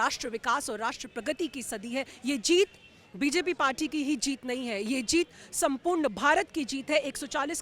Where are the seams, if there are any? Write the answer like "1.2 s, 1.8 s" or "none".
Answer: 2.1 s